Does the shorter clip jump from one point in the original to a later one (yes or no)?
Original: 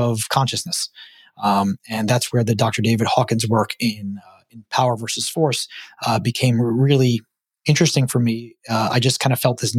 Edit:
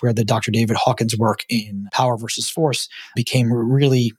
yes